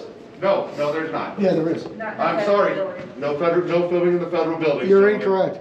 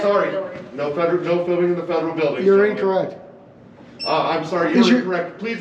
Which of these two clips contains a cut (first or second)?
first